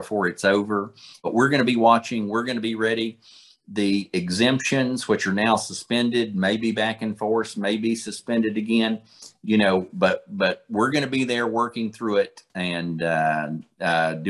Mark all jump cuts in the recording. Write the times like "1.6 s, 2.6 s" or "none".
1.3 s